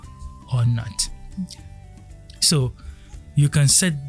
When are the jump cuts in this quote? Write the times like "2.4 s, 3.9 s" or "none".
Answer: none